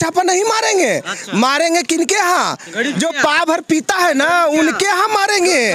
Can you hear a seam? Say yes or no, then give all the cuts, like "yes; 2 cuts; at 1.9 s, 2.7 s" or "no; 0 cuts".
no; 0 cuts